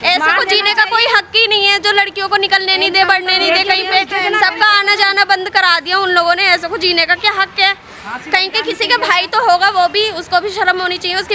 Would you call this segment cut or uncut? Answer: uncut